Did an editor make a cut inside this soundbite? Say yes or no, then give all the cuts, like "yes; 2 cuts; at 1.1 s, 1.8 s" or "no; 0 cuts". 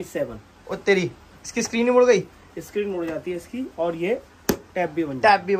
no; 0 cuts